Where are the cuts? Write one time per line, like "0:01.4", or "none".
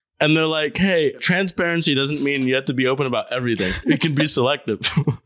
0:01.2
0:03.8